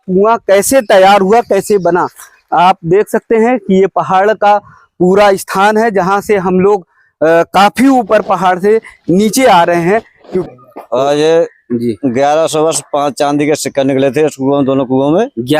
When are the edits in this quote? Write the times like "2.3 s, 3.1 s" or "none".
10.5 s